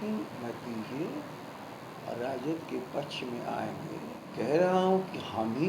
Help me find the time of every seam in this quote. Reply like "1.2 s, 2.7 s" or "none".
4.3 s